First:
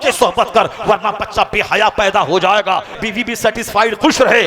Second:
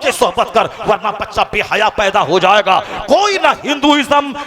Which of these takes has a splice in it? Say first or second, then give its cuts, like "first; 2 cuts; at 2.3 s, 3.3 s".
first; 1 cut; at 2.9 s